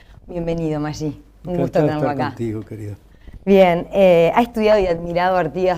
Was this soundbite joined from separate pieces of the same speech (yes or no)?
no